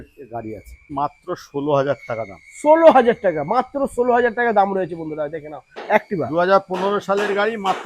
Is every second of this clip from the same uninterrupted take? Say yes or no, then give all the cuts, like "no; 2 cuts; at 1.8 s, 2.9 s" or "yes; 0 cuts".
no; 2 cuts; at 0.9 s, 5.8 s